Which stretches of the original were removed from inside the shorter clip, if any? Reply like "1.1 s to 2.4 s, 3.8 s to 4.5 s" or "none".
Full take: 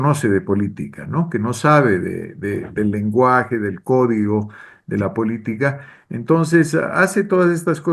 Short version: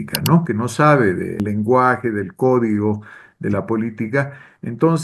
2.3 s to 2.9 s